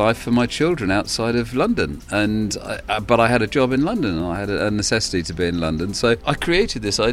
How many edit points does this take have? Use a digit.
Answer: 1